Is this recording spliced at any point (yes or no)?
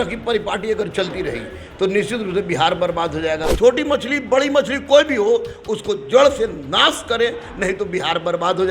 yes